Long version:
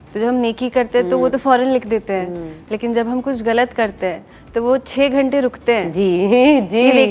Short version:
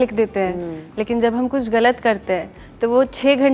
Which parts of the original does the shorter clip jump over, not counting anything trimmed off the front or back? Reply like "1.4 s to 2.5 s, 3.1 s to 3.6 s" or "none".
none